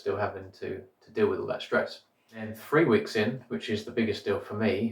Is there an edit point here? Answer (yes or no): yes